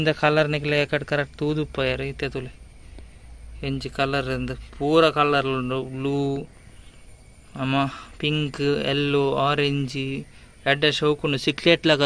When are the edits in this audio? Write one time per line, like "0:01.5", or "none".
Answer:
none